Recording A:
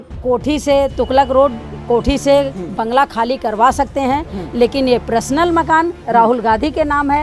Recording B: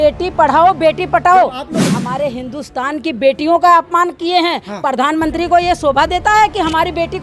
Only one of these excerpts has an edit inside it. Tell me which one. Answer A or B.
B